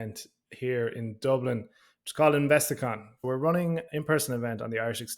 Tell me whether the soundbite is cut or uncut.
cut